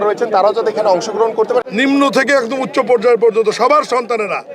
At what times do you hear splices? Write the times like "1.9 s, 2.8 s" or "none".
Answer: 1.7 s